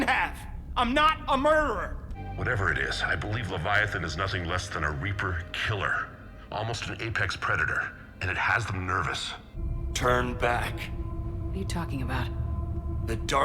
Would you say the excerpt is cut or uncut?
cut